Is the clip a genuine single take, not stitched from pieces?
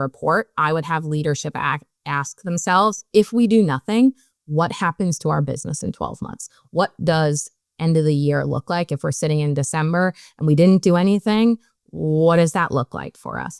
yes; 0 cuts

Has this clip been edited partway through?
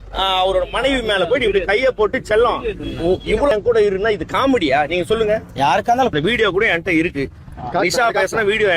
yes; 2 cuts; at 3.5 s, 6.1 s

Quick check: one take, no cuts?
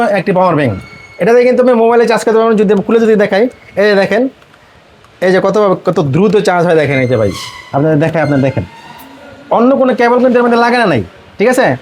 yes; 0 cuts

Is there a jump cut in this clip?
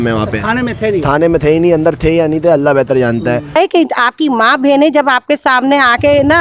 yes; 1 cut; at 3.5 s

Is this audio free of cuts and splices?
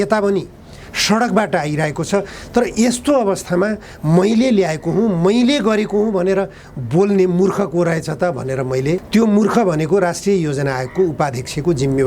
no; 1 cut; at 9.0 s

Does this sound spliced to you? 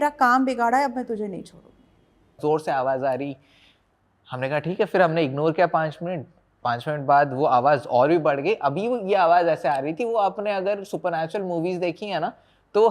yes; 1 cut; at 2.4 s

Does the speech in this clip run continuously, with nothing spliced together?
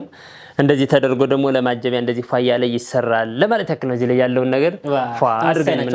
yes; 0 cuts

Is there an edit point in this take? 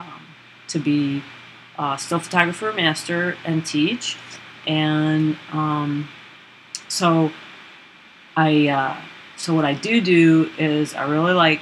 yes; 1 cut; at 2.1 s

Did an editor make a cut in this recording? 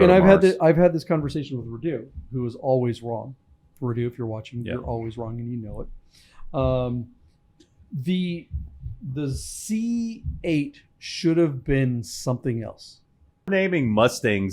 yes; 1 cut; at 13.5 s

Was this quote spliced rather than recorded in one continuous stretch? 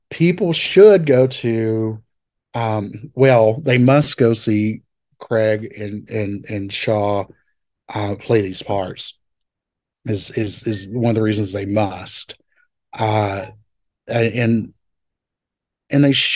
no; 0 cuts

